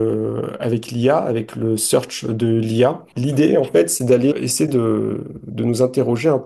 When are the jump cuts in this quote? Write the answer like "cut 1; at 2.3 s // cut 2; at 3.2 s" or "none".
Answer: cut 1; at 3.1 s // cut 2; at 4.4 s